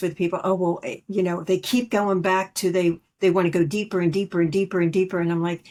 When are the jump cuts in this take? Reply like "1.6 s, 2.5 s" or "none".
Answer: none